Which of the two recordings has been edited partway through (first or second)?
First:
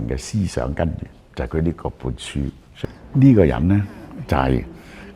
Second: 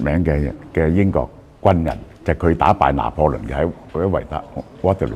first